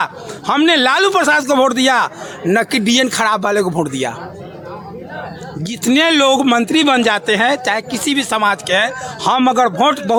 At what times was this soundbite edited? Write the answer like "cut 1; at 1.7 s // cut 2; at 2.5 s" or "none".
none